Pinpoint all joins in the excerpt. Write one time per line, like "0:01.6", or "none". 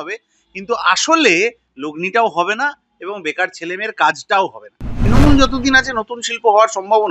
0:04.9